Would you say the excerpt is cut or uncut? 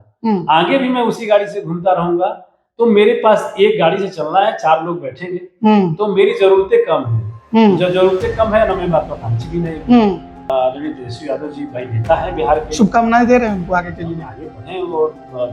cut